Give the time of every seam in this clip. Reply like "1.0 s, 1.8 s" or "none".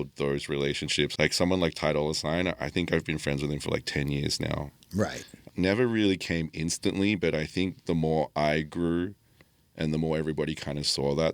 1.1 s, 5.3 s